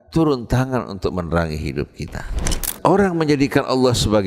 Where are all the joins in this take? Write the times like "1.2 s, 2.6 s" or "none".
2.6 s